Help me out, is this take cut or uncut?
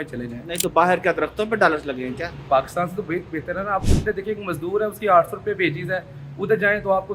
uncut